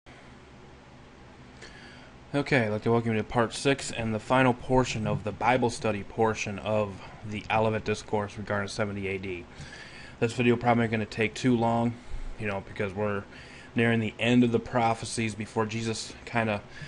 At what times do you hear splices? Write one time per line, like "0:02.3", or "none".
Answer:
none